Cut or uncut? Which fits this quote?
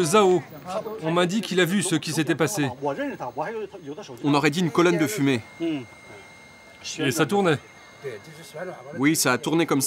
uncut